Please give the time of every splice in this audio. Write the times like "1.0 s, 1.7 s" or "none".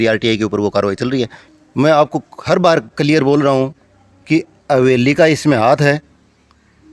1.4 s